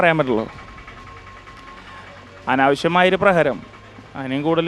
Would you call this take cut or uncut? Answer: uncut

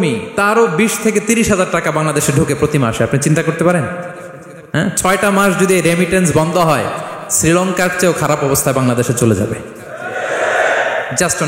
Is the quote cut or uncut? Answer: uncut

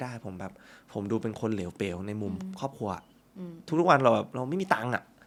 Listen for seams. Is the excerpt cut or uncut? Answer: uncut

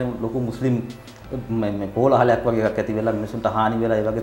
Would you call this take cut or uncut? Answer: uncut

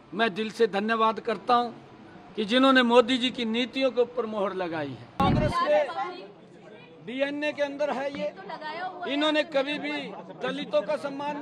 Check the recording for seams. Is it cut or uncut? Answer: cut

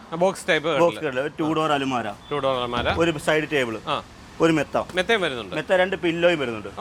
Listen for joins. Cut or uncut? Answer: uncut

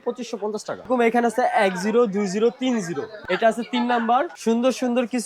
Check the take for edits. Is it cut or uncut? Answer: cut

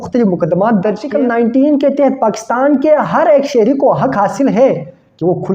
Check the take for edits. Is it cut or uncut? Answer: cut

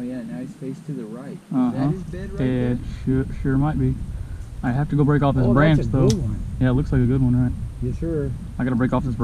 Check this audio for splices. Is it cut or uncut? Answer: uncut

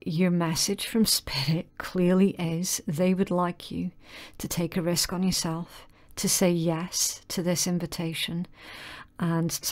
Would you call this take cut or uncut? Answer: uncut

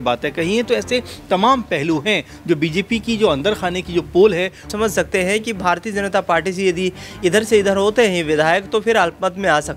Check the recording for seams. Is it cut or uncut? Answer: cut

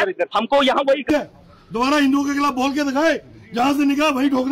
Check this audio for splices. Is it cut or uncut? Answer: cut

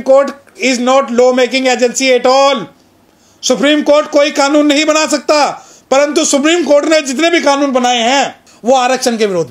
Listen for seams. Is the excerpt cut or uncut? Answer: cut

